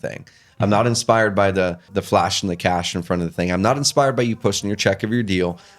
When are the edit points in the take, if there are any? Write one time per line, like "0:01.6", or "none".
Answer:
0:01.9